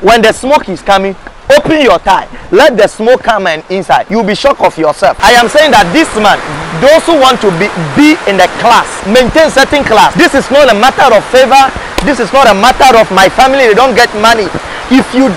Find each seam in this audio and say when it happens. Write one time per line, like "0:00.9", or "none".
0:04.1
0:05.2
0:09.0
0:10.1